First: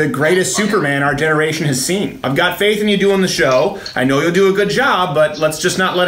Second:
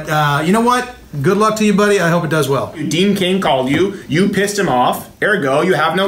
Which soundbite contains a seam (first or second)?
second